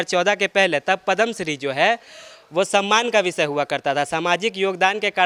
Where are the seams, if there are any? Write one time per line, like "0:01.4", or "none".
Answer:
none